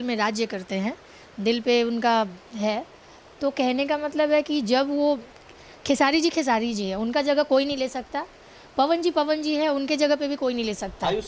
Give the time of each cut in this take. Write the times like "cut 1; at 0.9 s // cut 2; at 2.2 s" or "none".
none